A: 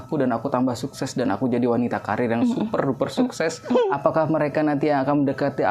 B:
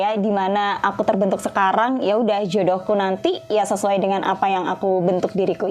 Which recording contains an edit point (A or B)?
A